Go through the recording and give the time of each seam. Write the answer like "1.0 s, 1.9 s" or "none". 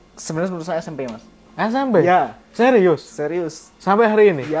none